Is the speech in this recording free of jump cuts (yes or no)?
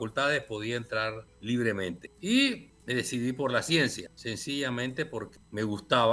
no